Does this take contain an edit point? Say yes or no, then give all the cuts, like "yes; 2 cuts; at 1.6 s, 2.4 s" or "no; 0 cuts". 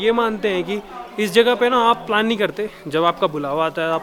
no; 0 cuts